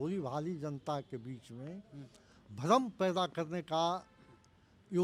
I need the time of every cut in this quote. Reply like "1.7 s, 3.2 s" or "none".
none